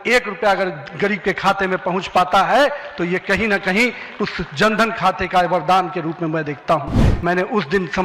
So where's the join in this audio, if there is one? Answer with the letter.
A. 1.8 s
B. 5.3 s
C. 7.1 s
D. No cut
C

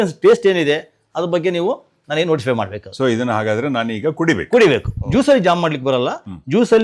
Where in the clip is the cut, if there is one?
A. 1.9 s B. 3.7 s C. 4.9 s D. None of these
C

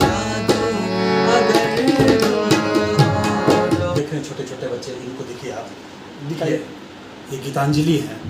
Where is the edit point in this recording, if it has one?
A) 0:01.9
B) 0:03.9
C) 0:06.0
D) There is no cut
B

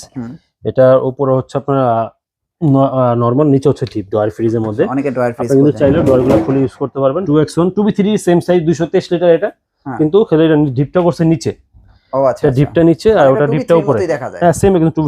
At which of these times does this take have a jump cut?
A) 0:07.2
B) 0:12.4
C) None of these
A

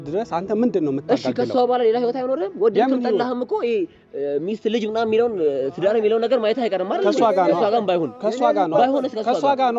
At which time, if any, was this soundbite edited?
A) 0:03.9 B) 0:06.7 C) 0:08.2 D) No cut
D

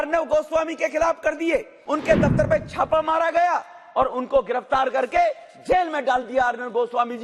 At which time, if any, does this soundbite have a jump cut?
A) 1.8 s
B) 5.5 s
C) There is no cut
A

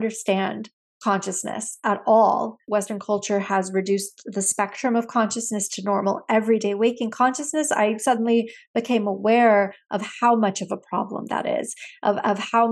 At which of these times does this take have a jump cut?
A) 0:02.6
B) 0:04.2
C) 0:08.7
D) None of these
A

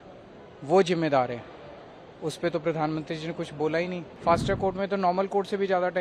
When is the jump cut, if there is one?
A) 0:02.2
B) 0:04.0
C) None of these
B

